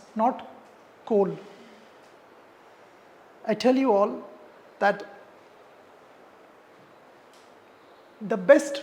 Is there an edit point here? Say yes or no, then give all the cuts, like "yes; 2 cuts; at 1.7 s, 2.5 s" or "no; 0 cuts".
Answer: yes; 1 cut; at 2.2 s